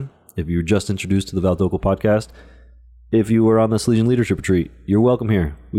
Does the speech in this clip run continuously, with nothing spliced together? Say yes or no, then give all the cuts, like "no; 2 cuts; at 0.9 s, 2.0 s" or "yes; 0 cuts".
yes; 0 cuts